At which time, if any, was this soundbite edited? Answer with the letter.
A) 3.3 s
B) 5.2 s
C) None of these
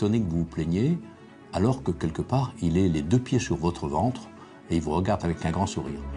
B